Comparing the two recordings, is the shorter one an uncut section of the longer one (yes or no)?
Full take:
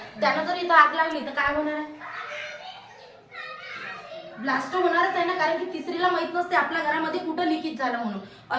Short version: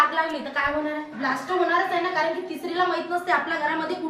no